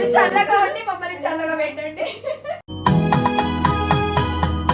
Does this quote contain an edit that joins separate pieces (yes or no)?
no